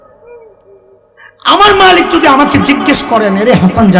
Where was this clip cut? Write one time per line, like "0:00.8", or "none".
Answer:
0:01.2